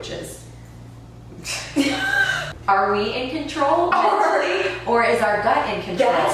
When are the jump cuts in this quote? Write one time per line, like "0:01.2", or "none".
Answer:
0:02.4